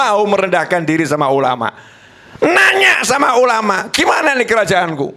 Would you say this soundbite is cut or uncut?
uncut